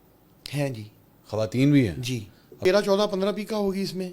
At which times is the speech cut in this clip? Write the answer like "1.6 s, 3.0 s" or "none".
2.5 s